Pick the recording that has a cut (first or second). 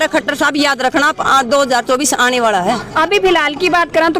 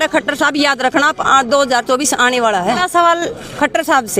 second